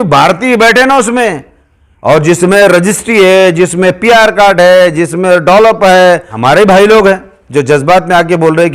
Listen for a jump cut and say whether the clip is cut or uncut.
cut